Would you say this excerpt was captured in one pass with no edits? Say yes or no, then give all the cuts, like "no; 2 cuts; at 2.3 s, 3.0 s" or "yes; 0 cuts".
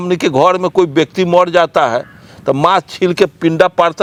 yes; 0 cuts